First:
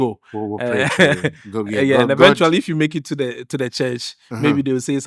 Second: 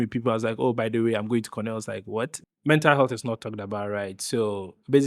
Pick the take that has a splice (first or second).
second